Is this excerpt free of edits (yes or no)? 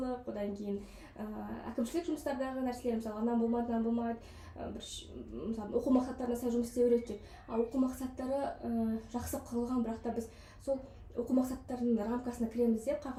yes